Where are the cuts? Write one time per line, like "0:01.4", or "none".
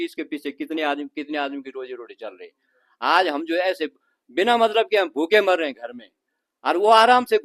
none